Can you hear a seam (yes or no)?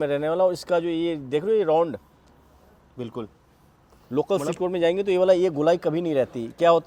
no